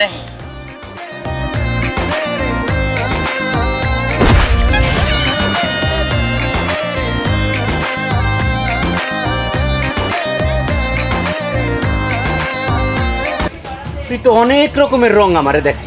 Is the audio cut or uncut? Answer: cut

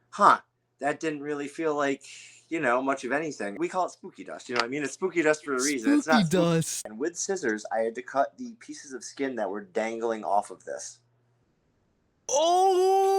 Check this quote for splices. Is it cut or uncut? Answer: cut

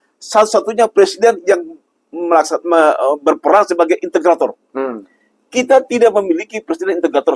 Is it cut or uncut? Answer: uncut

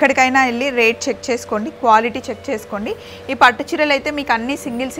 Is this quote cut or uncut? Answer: uncut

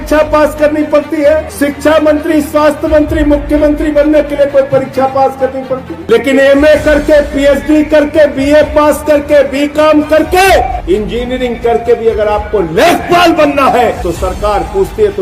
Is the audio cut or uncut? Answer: cut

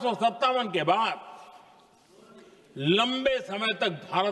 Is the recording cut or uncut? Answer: uncut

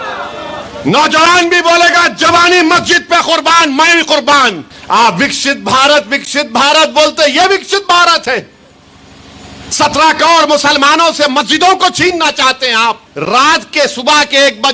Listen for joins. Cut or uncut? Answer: cut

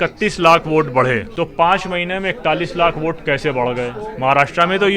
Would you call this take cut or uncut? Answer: cut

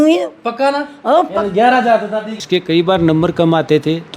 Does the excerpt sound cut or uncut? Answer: cut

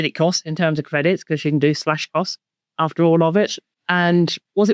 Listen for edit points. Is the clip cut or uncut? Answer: cut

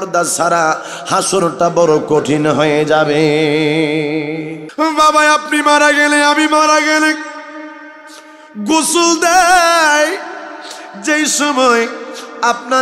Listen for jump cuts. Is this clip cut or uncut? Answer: cut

